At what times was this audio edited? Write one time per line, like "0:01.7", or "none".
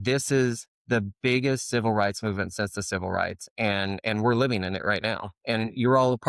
none